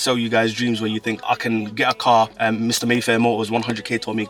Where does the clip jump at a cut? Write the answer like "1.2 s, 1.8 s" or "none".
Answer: none